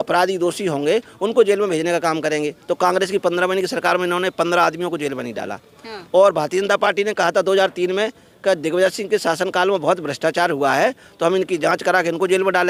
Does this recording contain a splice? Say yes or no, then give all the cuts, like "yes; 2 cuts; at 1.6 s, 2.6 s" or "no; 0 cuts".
no; 0 cuts